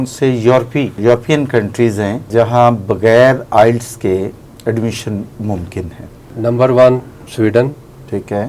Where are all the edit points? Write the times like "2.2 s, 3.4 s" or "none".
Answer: 1.0 s, 2.3 s, 6.3 s, 7.2 s